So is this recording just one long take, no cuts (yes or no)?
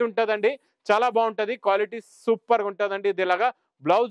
yes